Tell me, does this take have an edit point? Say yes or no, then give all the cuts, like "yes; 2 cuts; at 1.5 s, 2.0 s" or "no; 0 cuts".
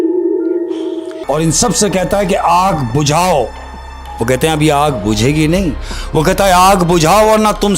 yes; 1 cut; at 1.1 s